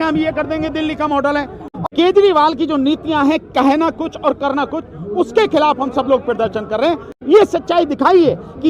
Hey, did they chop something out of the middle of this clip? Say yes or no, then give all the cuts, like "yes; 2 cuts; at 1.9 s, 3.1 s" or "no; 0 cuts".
yes; 1 cut; at 1.6 s